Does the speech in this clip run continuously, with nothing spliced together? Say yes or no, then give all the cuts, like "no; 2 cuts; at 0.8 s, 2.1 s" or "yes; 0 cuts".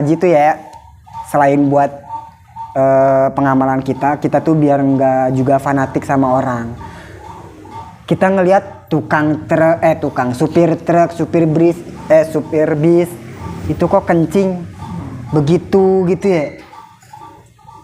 yes; 0 cuts